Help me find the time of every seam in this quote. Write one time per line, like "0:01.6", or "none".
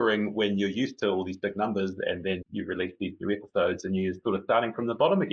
0:02.4